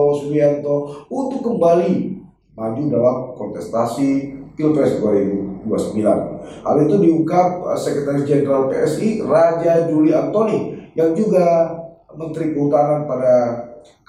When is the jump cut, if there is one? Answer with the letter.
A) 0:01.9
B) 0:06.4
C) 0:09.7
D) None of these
D